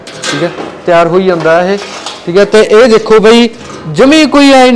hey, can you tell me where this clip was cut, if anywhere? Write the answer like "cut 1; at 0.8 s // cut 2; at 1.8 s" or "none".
none